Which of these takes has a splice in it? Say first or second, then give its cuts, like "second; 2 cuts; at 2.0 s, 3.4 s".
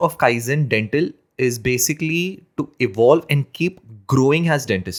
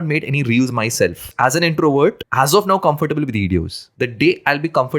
second; 3 cuts; at 1.2 s, 2.2 s, 3.8 s